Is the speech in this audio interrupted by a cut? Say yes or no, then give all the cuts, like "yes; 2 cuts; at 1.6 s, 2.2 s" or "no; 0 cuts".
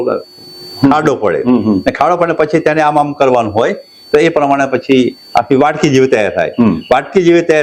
no; 0 cuts